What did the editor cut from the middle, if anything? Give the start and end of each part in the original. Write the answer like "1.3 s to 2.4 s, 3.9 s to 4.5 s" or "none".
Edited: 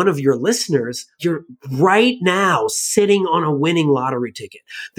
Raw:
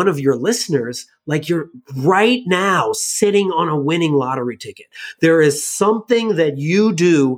1.2 s to 1.4 s